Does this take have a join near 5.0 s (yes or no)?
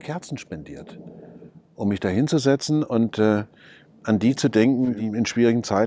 yes